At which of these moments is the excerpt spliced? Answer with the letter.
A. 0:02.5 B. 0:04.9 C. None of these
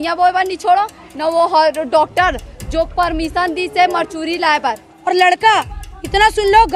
B